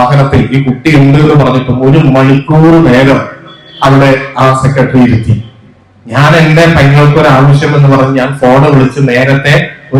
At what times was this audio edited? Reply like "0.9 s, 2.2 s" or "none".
none